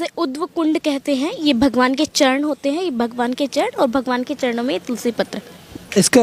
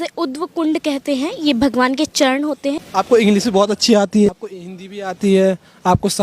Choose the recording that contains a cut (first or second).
second